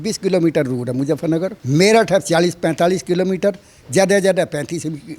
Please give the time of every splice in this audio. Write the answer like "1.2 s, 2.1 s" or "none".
1.6 s